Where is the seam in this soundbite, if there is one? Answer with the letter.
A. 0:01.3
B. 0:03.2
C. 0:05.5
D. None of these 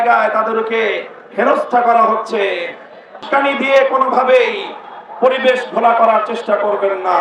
B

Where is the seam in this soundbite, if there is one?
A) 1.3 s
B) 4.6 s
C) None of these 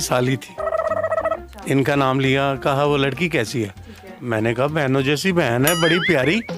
A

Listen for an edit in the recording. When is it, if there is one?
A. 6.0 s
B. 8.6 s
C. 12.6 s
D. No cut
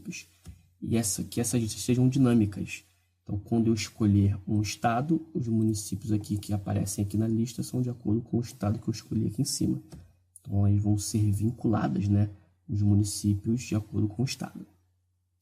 A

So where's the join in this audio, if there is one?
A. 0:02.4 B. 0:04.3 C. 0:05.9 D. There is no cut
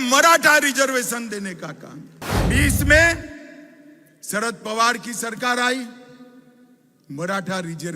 A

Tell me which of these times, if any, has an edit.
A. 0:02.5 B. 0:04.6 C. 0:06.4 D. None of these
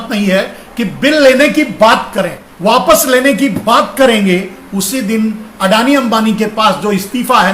A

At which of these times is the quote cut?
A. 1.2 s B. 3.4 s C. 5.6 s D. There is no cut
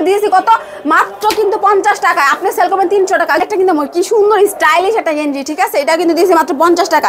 B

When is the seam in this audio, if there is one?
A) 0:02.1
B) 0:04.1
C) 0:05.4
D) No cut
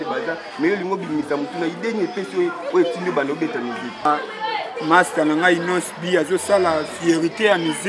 B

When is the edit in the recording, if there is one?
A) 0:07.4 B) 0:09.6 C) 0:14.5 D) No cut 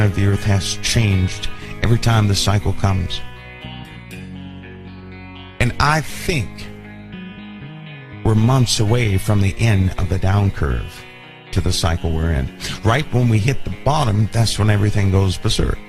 B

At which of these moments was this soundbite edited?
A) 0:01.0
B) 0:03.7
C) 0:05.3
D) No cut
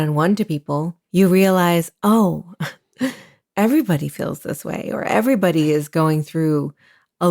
A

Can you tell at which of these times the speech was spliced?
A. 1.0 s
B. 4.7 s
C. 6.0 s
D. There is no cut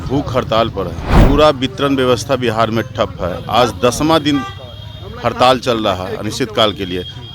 A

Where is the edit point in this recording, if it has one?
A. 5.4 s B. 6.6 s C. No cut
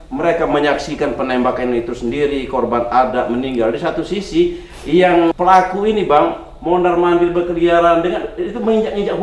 A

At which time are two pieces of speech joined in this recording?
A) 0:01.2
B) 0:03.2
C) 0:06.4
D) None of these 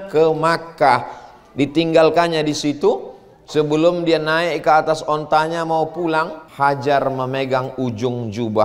C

